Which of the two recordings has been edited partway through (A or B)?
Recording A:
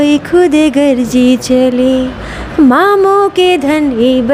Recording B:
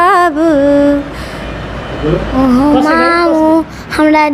B